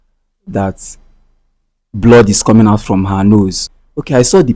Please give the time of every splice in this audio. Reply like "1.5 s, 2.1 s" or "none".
3.6 s